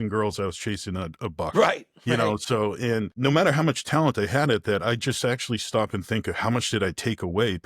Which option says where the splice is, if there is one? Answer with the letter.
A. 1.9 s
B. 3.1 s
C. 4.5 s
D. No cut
B